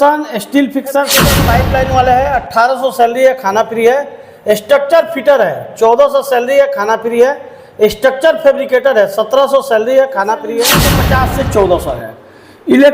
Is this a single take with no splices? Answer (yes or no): no